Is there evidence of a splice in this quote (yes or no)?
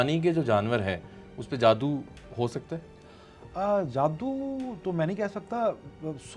no